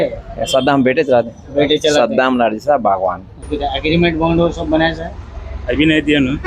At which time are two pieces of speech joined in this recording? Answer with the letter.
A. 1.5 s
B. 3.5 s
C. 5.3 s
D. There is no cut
B